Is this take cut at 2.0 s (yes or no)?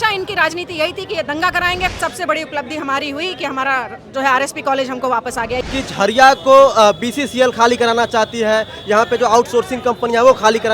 yes